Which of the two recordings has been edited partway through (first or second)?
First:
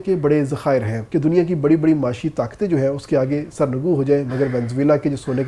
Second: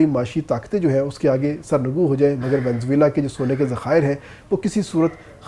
first